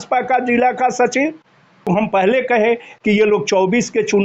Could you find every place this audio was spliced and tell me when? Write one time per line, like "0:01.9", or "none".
0:01.9